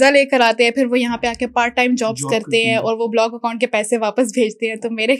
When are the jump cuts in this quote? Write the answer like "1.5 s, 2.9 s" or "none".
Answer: none

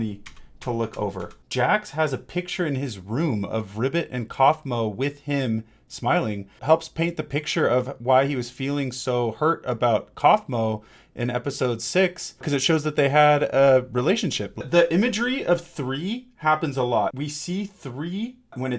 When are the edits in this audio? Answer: 1.3 s, 6.6 s, 12.5 s, 14.6 s, 17.1 s

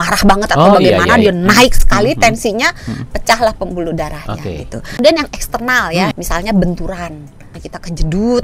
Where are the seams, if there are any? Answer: 5.0 s, 6.1 s, 7.5 s

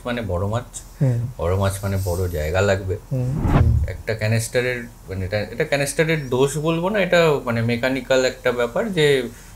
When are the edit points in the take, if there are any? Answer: 3.4 s

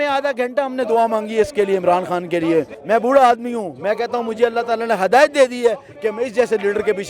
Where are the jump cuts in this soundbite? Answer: 2.8 s

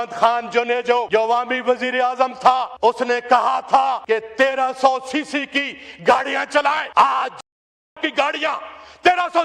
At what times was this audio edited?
1.1 s, 2.7 s, 4.0 s, 6.9 s

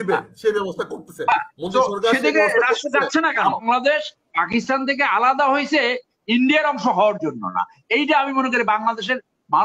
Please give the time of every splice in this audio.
3.6 s

